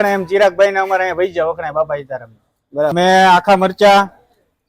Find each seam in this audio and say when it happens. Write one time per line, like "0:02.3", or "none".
0:02.9